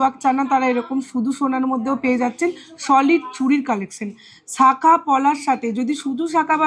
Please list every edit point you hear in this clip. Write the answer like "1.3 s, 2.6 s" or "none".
none